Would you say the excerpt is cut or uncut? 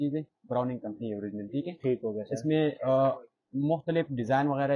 uncut